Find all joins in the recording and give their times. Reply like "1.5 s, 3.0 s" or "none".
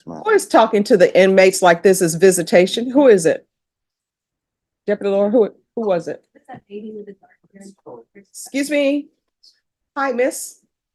none